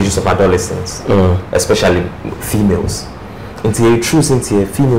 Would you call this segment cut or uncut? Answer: uncut